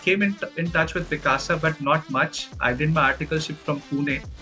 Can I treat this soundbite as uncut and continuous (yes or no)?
yes